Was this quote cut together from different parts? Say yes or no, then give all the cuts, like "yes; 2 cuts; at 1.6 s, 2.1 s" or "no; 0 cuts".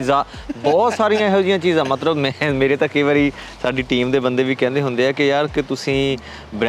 no; 0 cuts